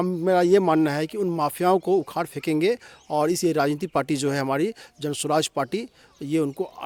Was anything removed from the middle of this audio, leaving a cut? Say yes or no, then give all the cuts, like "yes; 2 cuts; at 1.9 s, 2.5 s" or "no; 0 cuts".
no; 0 cuts